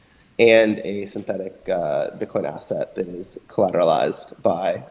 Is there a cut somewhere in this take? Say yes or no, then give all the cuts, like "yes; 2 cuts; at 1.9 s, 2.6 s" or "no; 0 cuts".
no; 0 cuts